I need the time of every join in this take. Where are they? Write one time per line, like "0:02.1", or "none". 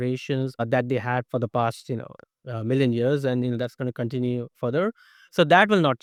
none